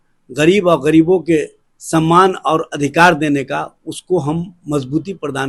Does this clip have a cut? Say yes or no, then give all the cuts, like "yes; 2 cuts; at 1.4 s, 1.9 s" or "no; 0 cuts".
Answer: no; 0 cuts